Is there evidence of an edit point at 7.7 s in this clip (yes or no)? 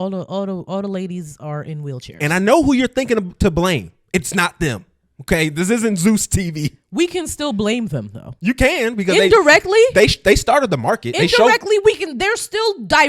no